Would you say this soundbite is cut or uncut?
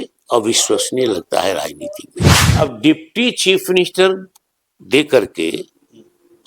cut